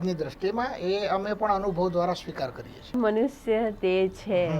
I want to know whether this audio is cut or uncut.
cut